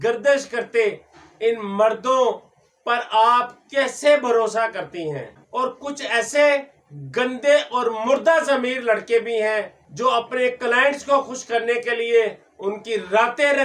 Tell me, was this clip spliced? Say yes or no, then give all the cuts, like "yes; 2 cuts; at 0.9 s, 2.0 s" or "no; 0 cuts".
yes; 1 cut; at 5.4 s